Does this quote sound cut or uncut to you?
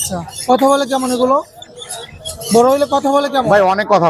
uncut